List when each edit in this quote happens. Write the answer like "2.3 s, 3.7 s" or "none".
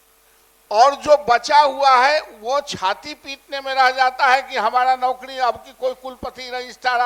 none